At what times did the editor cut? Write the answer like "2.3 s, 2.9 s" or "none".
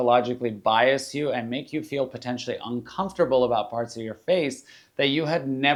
none